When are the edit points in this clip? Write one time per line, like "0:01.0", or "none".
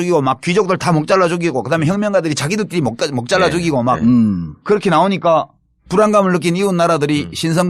0:03.8